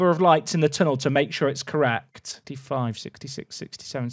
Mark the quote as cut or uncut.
cut